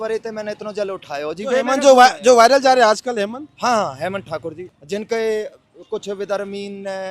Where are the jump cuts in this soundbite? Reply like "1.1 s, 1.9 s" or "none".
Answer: 4.7 s